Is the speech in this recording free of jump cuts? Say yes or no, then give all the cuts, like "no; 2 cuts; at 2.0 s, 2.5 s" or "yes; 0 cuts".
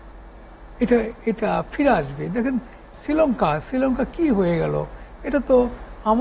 yes; 0 cuts